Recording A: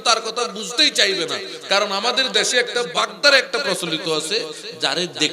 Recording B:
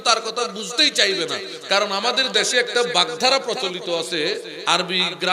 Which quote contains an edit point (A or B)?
A